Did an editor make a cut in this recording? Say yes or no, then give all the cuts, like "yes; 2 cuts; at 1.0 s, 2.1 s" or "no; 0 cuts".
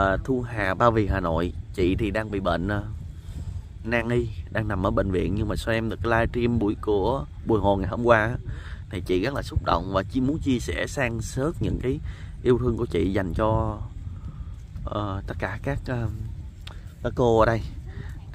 no; 0 cuts